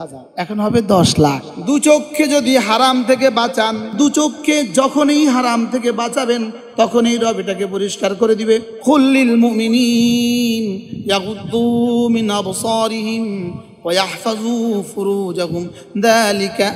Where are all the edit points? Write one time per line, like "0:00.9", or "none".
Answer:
0:01.5
0:04.0
0:08.7